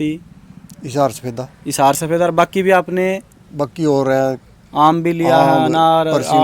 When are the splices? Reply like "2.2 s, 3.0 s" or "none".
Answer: none